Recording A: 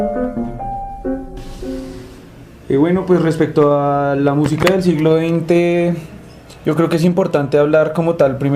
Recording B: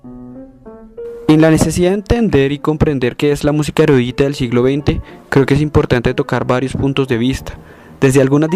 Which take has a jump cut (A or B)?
A